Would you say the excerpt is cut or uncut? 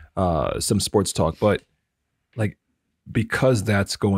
uncut